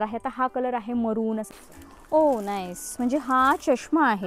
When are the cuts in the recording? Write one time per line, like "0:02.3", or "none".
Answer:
0:01.5

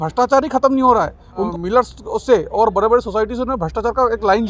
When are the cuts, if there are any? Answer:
0:01.5

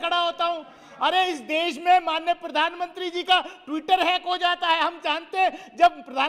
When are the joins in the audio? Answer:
none

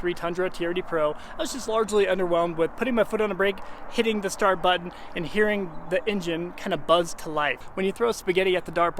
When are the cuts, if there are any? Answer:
0:07.6

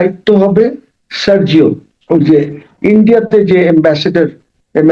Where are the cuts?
0:01.9

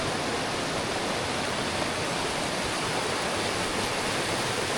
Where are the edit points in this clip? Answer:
none

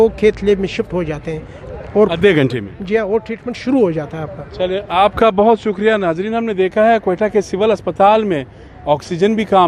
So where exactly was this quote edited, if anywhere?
none

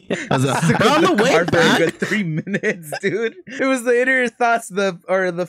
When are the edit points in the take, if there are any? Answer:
0:03.4

